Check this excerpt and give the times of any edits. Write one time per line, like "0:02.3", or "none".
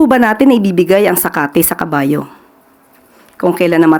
none